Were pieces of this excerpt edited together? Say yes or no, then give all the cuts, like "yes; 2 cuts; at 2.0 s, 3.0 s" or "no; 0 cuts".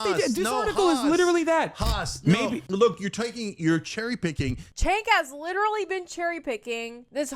yes; 1 cut; at 4.7 s